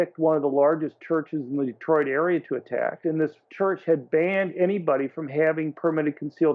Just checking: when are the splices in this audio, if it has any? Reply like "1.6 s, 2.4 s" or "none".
3.0 s